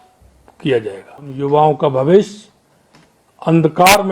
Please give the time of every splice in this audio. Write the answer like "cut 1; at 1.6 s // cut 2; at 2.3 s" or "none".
cut 1; at 1.3 s

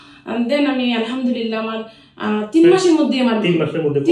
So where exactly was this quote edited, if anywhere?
none

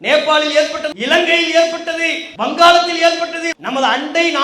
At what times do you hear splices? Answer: cut 1; at 0.9 s // cut 2; at 2.2 s // cut 3; at 3.4 s

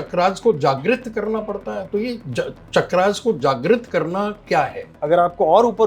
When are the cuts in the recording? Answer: cut 1; at 5.0 s

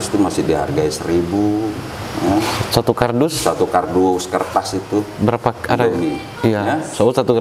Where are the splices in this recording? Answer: none

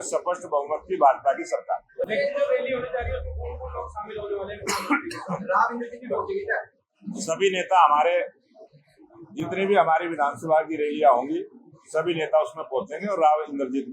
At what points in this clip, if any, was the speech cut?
none

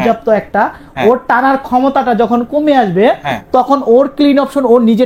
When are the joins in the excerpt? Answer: none

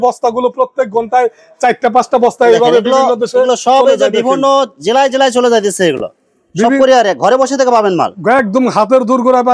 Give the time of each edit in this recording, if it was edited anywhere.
none

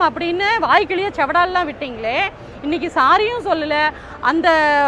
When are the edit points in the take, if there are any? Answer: none

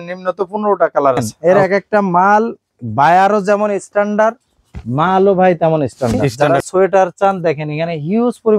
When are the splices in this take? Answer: cut 1; at 1.3 s // cut 2; at 6.3 s

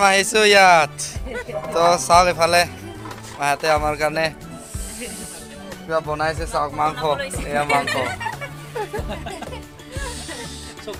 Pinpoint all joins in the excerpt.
none

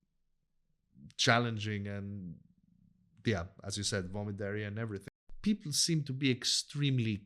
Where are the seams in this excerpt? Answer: cut 1; at 5.0 s

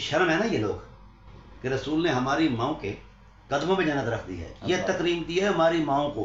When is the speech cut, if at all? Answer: none

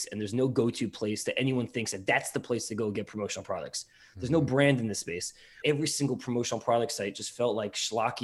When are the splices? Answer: cut 1; at 5.6 s

